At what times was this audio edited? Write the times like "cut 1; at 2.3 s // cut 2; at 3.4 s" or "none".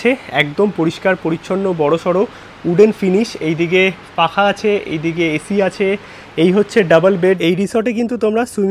cut 1; at 7.4 s